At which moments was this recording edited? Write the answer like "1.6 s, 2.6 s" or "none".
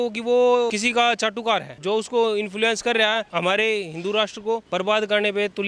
0.8 s, 1.7 s, 3.3 s, 4.7 s